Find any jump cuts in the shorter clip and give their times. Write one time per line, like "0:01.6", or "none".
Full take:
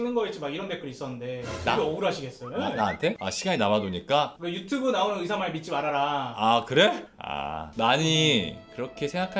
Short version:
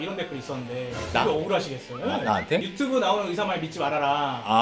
0:02.7